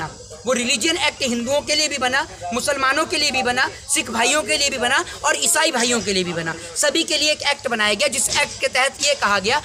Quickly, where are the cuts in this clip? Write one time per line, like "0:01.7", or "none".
none